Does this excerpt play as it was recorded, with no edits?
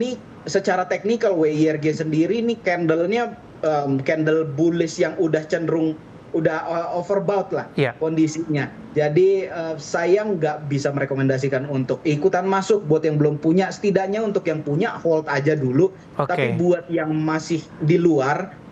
yes; 0 cuts

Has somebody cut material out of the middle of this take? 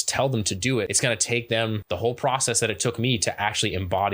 yes; 2 cuts; at 0.9 s, 1.8 s

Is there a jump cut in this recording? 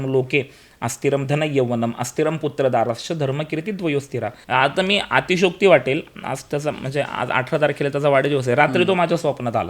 yes; 1 cut; at 4.4 s

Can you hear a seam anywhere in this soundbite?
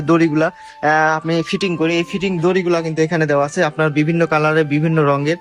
no; 0 cuts

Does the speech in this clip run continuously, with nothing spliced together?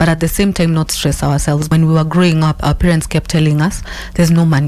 no; 1 cut; at 1.7 s

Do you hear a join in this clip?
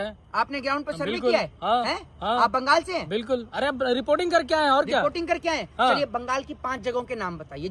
no; 0 cuts

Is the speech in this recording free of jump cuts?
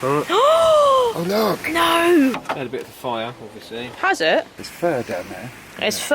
no; 2 cuts; at 2.5 s, 4.7 s

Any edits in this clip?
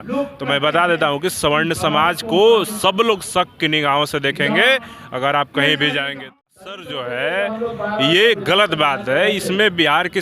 yes; 1 cut; at 6.9 s

